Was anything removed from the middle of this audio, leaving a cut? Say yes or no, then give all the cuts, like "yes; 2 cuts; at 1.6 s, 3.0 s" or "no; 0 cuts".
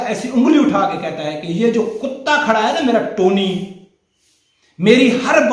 no; 0 cuts